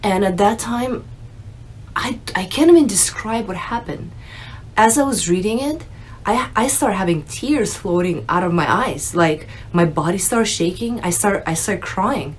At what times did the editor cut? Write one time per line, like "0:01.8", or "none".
none